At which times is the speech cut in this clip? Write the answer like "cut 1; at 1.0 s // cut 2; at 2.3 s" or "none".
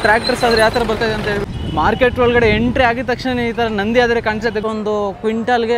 cut 1; at 1.5 s // cut 2; at 4.6 s